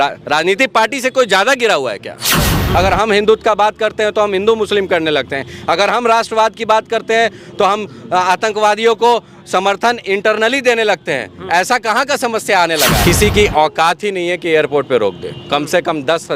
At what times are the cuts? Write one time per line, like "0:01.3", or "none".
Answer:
0:02.5
0:13.0